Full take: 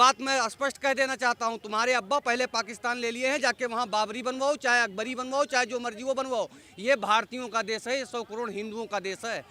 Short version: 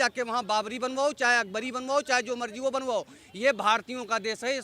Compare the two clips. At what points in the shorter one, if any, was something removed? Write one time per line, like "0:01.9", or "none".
none